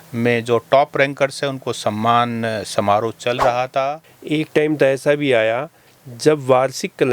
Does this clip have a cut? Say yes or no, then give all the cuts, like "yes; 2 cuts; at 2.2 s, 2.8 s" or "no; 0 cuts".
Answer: yes; 1 cut; at 4.1 s